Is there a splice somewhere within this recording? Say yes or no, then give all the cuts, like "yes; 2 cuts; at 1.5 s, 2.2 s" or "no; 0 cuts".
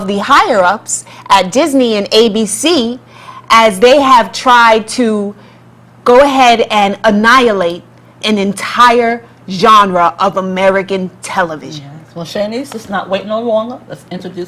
yes; 1 cut; at 9.1 s